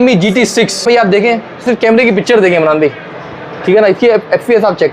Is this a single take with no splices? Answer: no; 2 cuts; at 0.9 s, 1.6 s

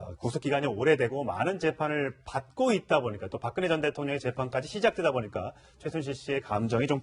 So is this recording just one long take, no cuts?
no; 1 cut; at 1.5 s

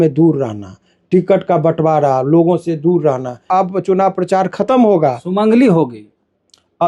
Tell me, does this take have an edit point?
yes; 1 cut; at 3.4 s

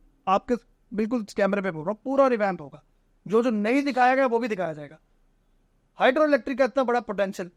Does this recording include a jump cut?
no; 0 cuts

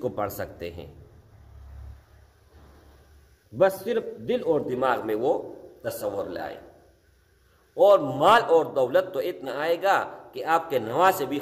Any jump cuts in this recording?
no; 0 cuts

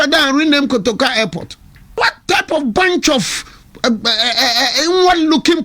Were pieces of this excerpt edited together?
yes; 1 cut; at 2.0 s

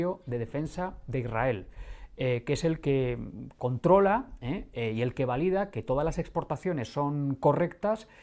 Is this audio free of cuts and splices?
yes; 0 cuts

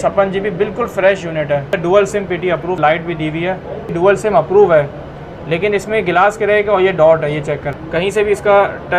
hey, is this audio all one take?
no; 4 cuts; at 1.8 s, 2.8 s, 3.9 s, 7.7 s

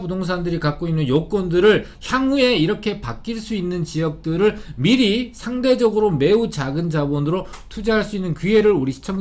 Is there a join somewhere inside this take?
no; 0 cuts

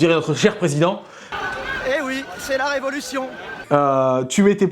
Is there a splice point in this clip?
no; 0 cuts

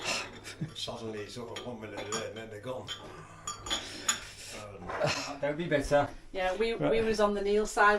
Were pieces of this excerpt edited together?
yes; 1 cut; at 5.5 s

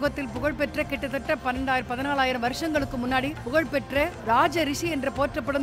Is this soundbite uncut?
no; 1 cut; at 3.7 s

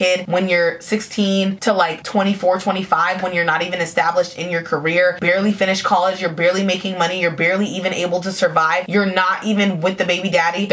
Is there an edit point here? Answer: no; 0 cuts

